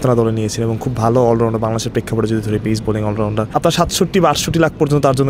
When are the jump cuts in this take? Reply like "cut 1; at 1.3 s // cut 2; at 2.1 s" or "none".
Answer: cut 1; at 3.5 s